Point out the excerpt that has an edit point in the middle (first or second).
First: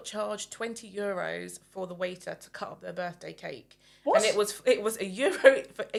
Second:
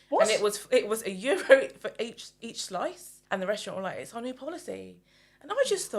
second